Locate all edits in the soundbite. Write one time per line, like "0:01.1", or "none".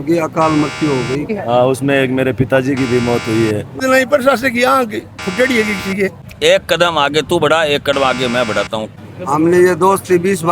0:01.3
0:03.8
0:06.2
0:08.9

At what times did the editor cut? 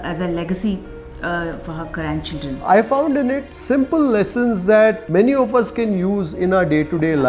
0:02.6
0:03.5
0:05.0

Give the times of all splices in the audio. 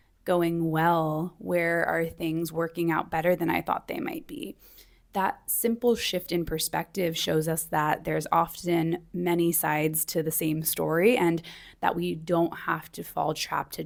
none

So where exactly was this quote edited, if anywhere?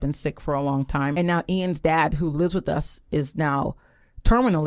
0:01.2

